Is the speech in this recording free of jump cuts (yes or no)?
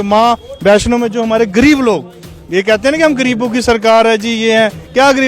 yes